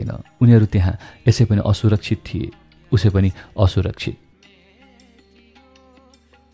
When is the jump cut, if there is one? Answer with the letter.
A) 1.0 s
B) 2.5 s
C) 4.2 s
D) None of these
C